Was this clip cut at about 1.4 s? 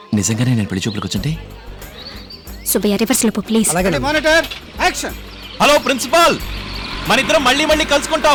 no; 0 cuts

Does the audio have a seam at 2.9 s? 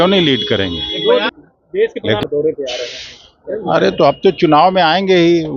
no; 1 cut; at 1.3 s

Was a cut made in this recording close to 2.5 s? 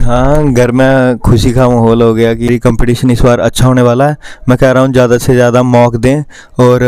yes; 1 cut; at 2.5 s

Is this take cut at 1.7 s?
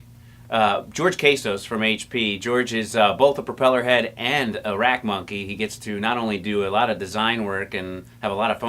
no; 1 cut; at 5.2 s

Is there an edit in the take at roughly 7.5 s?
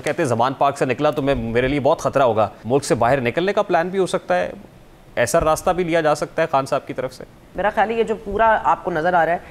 yes; 2 cuts; at 2.6 s, 7.5 s

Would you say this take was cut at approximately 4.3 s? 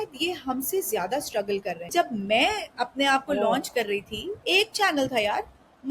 yes; 2 cuts; at 1.9 s, 4.3 s

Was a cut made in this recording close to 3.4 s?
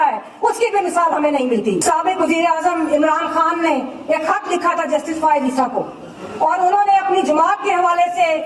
no; 1 cut; at 1.8 s

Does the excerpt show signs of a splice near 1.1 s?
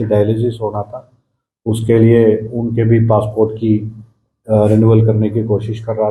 no; 0 cuts

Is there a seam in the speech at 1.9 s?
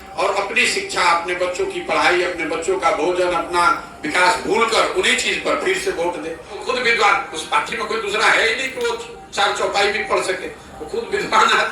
no; 1 cut; at 6.5 s

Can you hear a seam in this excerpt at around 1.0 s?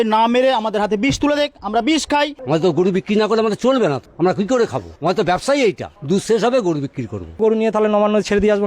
no; 5 cuts; at 2.4 s, 4.1 s, 4.9 s, 5.9 s, 7.4 s

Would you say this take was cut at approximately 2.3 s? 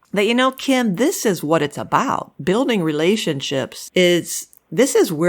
no; 1 cut; at 3.8 s

